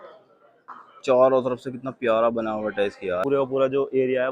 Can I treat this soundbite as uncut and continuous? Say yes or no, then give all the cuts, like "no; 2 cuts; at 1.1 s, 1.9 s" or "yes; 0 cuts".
no; 1 cut; at 3.2 s